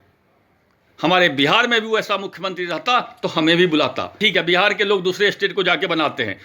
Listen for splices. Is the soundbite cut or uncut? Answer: cut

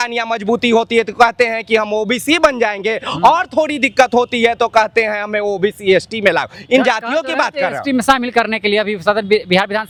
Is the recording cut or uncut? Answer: uncut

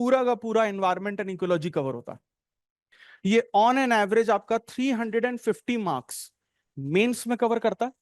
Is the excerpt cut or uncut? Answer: cut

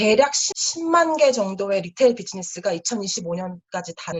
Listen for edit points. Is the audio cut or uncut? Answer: uncut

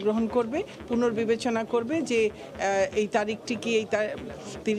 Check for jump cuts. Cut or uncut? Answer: uncut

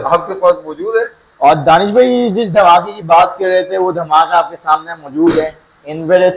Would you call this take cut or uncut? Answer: cut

